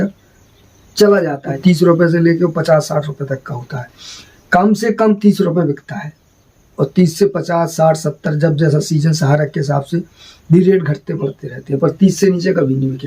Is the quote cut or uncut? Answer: cut